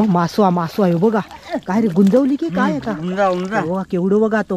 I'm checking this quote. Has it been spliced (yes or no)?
no